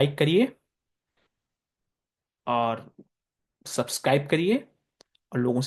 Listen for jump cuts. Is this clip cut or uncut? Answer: uncut